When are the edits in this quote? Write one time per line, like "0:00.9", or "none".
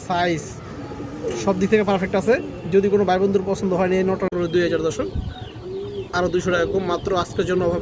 0:04.3